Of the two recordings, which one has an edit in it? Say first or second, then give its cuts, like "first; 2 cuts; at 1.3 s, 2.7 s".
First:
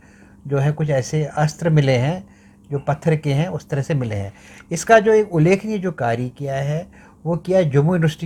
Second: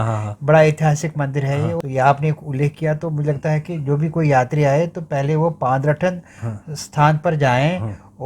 second; 1 cut; at 1.8 s